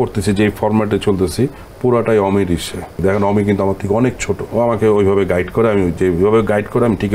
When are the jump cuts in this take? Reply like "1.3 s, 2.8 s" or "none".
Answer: 3.0 s, 4.4 s